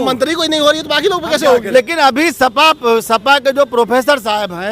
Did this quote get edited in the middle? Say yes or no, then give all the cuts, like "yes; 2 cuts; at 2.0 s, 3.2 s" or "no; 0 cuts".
yes; 1 cut; at 1.7 s